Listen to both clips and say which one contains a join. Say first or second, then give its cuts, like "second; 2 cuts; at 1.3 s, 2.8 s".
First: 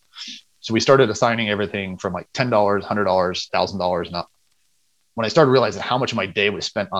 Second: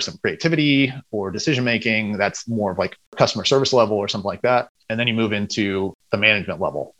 second; 3 cuts; at 3.1 s, 4.8 s, 6.0 s